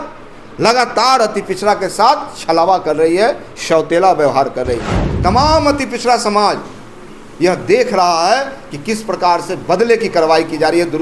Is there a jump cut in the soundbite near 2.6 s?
no; 1 cut; at 5.0 s

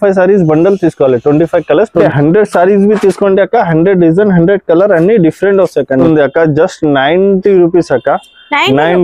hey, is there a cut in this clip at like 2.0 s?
yes; 2 cuts; at 2.0 s, 6.0 s

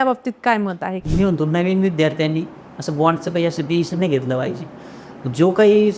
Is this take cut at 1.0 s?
yes; 1 cut; at 1.0 s

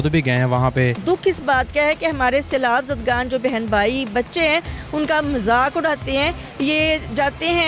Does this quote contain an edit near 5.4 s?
no; 1 cut; at 1.0 s

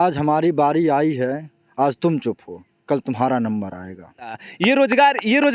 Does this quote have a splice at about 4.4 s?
yes; 1 cut; at 4.4 s

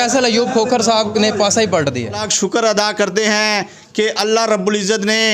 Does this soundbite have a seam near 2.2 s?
yes; 1 cut; at 2.2 s

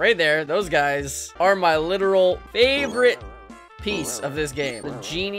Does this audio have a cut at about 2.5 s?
yes; 3 cuts; at 1.2 s, 2.5 s, 4.5 s

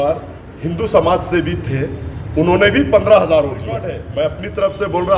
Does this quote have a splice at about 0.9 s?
no; 1 cut; at 4.0 s

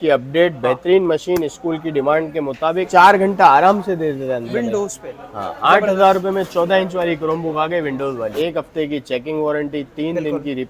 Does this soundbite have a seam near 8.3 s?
yes; 2 cuts; at 2.9 s, 8.3 s

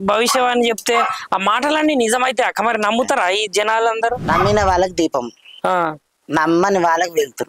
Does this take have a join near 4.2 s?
yes; 1 cut; at 4.2 s

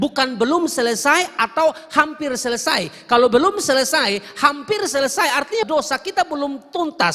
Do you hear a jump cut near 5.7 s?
yes; 1 cut; at 5.7 s

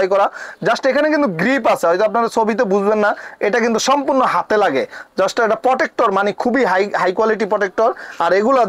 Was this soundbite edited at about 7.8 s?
no; 0 cuts

